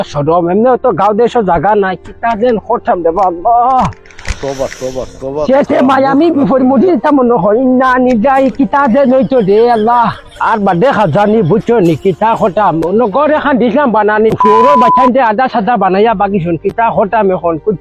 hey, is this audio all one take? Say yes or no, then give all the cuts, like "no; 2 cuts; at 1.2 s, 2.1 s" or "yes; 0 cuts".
yes; 0 cuts